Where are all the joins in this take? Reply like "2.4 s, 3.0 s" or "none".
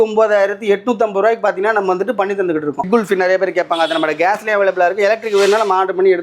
2.9 s